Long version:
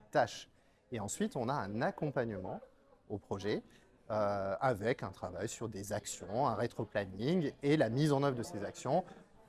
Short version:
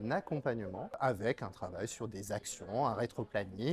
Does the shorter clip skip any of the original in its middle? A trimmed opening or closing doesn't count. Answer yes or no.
yes